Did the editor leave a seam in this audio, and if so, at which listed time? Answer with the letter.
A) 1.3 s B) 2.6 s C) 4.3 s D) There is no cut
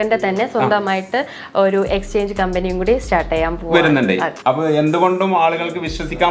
C